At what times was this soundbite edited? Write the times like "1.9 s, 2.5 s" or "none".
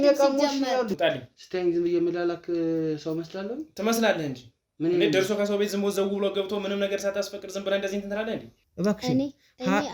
0.9 s, 8.6 s